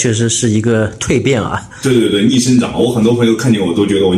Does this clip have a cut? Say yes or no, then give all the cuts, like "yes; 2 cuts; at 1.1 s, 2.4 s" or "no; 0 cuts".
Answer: no; 0 cuts